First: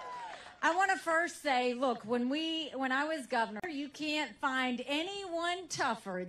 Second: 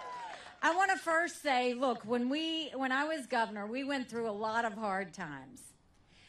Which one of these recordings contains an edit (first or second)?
second